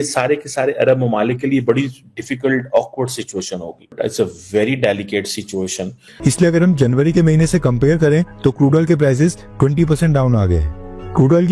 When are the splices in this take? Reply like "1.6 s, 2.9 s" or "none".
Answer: 6.1 s

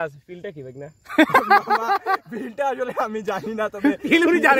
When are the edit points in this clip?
none

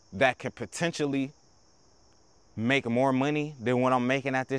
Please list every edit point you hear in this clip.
none

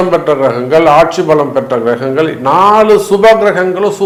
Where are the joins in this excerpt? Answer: none

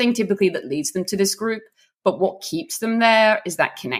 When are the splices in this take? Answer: none

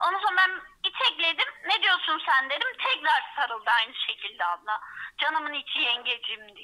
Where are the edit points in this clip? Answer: none

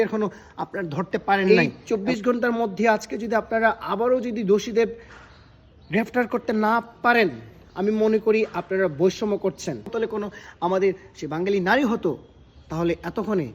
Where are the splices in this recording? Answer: 1.5 s, 9.9 s

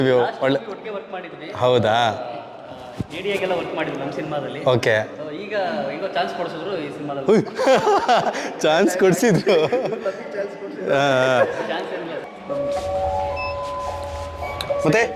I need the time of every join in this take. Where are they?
12.2 s

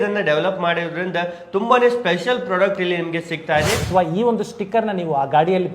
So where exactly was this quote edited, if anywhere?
3.8 s

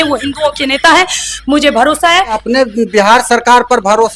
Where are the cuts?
2.4 s

